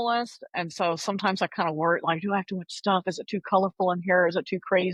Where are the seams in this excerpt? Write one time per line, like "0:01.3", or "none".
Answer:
none